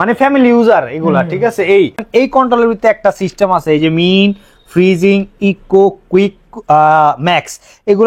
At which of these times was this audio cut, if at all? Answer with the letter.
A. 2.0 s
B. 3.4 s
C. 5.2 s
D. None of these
A